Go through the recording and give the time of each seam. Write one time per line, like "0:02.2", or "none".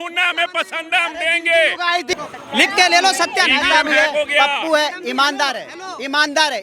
0:02.1